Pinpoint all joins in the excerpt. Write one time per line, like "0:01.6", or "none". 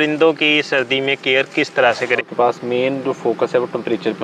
0:02.3